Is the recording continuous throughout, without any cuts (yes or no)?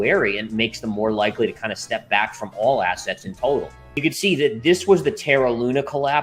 no